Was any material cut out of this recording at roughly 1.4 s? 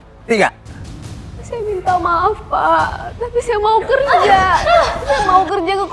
yes; 1 cut; at 1.4 s

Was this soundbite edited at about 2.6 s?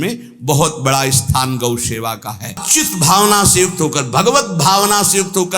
yes; 1 cut; at 2.6 s

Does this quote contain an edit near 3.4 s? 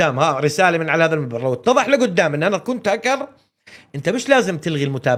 no; 0 cuts

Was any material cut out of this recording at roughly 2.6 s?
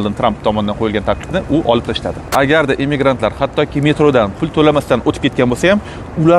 yes; 1 cut; at 2.6 s

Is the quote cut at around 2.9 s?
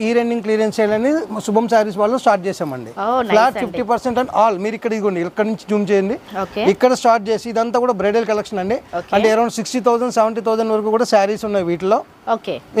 no; 0 cuts

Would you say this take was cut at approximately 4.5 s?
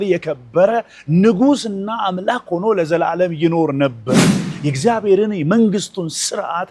yes; 1 cut; at 4.5 s

